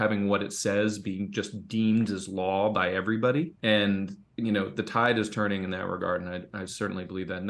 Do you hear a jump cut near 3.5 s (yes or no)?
yes